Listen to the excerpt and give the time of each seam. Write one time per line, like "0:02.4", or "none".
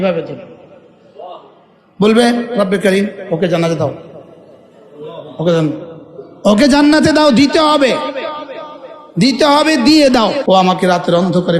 0:10.4